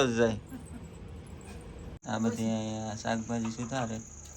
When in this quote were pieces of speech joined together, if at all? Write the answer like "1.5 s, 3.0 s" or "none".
2.0 s

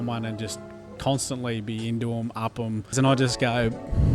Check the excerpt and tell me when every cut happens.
2.9 s

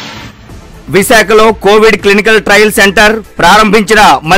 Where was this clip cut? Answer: none

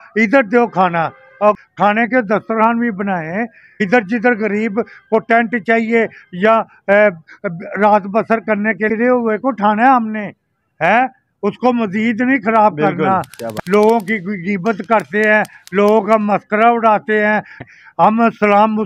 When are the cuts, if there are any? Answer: 1.4 s, 3.8 s, 8.8 s, 13.5 s, 17.6 s

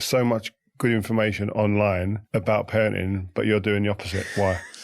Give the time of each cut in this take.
2.2 s

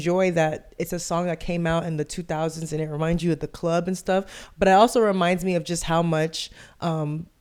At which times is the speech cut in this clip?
none

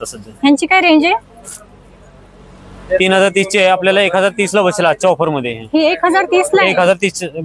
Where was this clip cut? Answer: none

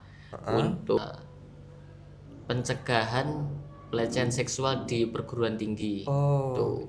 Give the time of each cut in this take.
1.0 s

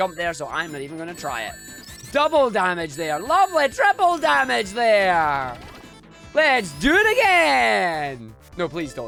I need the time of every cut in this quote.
none

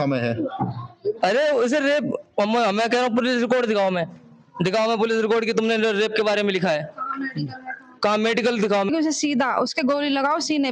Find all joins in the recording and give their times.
8.9 s

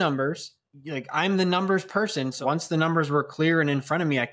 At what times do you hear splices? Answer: 2.3 s

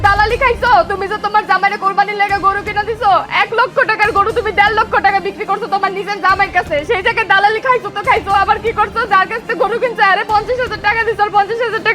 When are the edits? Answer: none

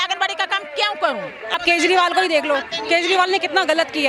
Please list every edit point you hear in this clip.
1.5 s

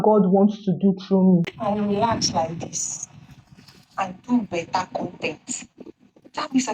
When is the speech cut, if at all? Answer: 1.5 s

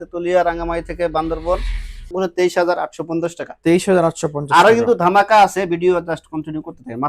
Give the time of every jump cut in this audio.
2.1 s

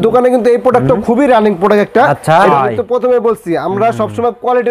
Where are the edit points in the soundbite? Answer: 2.5 s

